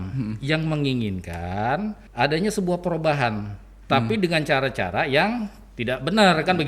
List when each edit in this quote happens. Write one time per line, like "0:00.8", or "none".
0:02.0